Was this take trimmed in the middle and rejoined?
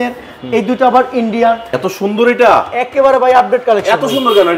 yes; 1 cut; at 1.8 s

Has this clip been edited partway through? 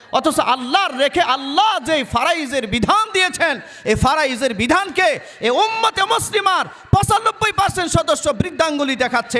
no; 0 cuts

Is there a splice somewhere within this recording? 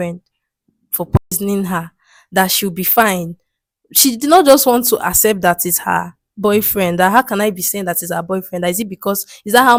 no; 0 cuts

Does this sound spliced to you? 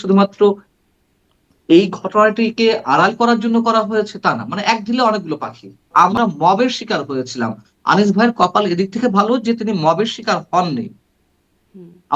yes; 1 cut; at 5.9 s

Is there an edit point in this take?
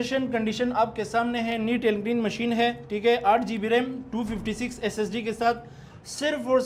no; 0 cuts

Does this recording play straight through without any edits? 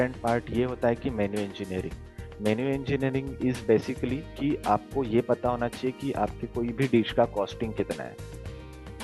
yes; 0 cuts

